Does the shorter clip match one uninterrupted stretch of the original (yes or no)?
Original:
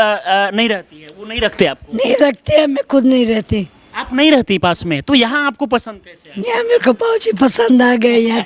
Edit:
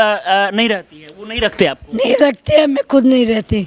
yes